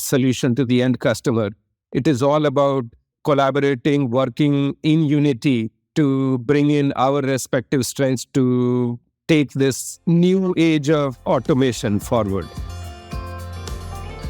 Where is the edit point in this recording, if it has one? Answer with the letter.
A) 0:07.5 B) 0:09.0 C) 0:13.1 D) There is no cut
C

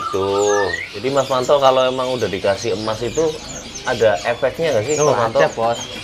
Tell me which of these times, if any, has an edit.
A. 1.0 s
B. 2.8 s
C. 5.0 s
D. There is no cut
A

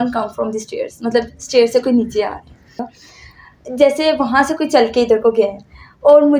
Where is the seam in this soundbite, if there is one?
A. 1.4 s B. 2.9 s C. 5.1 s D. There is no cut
B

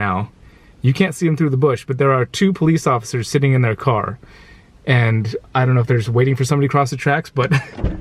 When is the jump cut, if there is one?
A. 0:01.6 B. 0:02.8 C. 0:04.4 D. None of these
D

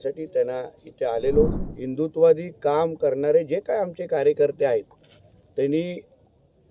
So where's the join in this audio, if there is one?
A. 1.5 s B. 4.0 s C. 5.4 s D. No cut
A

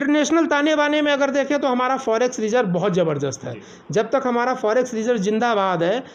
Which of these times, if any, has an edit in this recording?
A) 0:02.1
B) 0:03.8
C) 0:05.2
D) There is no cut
D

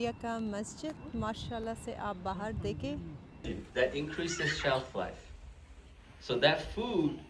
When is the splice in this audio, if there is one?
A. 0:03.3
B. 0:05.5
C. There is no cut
A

